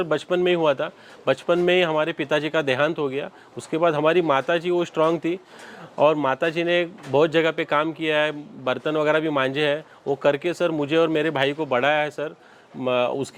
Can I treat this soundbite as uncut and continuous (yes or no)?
yes